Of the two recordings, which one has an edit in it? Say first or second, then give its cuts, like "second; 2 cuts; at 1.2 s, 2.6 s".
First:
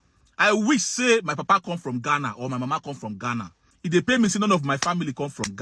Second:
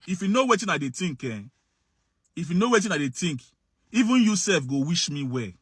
first; 1 cut; at 3.6 s